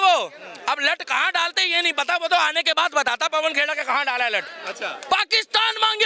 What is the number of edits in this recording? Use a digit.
1